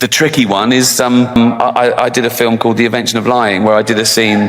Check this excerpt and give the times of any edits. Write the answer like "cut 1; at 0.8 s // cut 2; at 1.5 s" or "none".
cut 1; at 1.4 s

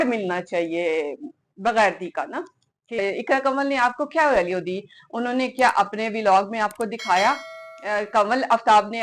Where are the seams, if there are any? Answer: cut 1; at 2.8 s

